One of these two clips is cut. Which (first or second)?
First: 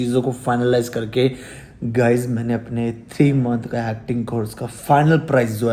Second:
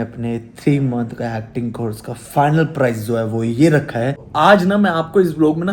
second